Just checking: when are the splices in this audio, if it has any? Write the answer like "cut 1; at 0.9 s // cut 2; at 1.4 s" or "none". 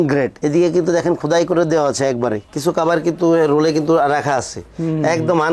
cut 1; at 2.5 s

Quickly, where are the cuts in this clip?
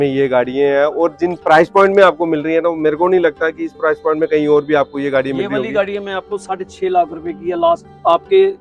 none

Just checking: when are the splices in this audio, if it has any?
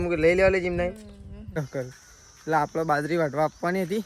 cut 1; at 1.6 s

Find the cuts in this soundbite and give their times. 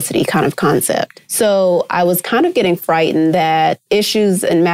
cut 1; at 1.2 s // cut 2; at 3.8 s

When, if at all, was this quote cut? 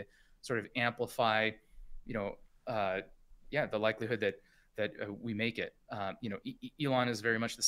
none

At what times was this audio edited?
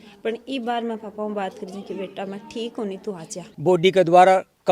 cut 1; at 3.5 s

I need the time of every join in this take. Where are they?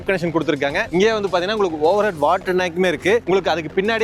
none

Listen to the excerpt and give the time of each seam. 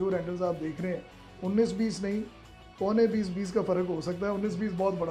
none

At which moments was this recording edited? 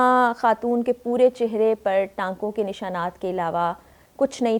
none

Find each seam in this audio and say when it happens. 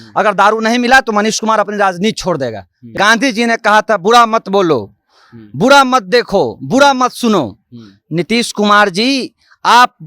cut 1; at 2.9 s

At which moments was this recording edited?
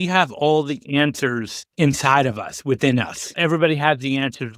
cut 1; at 3.3 s

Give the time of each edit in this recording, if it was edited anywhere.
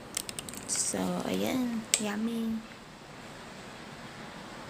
cut 1; at 3.3 s

